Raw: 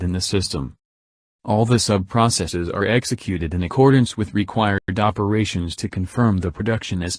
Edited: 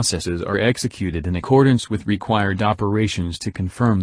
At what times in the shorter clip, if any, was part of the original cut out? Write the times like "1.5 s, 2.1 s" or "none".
2.5 s